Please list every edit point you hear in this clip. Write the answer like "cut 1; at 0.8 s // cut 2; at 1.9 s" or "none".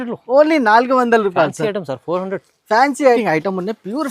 cut 1; at 3.2 s

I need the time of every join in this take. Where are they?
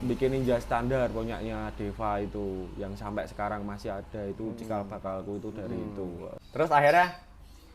cut 1; at 6.4 s

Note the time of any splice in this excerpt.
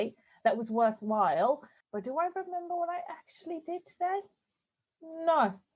cut 1; at 1.7 s

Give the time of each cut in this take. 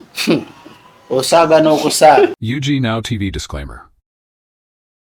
cut 1; at 2.4 s

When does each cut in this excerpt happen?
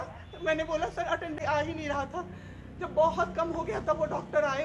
cut 1; at 1.4 s

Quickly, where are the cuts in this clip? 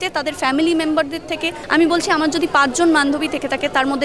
cut 1; at 1.6 s

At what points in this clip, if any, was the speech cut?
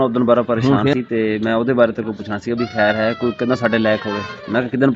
none

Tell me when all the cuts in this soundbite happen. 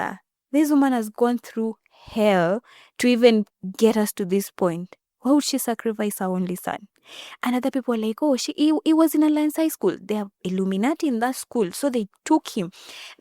none

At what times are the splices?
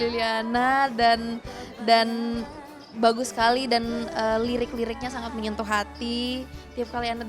none

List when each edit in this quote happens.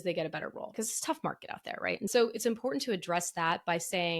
cut 1; at 0.7 s // cut 2; at 2.1 s

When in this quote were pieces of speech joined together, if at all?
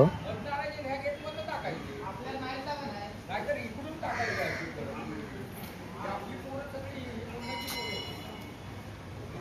none

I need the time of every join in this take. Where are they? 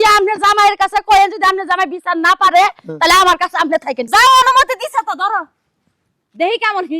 cut 1; at 4.0 s

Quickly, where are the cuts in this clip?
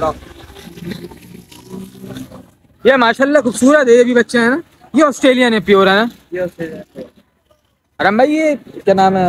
none

